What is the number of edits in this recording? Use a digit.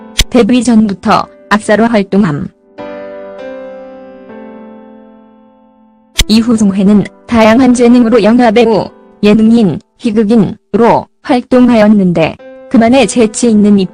1